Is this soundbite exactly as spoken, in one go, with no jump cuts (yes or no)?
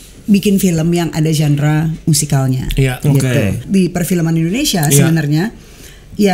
no